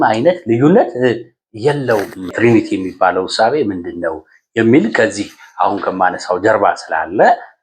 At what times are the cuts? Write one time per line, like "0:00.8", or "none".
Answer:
0:02.3